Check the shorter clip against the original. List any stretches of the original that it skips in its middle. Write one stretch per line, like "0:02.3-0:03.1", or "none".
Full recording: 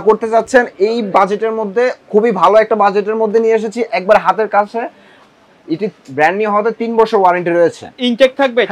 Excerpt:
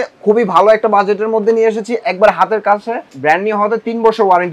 0:05.0-0:06.0